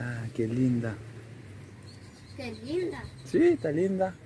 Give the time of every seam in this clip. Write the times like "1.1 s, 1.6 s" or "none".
none